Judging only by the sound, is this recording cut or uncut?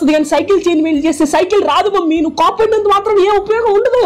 uncut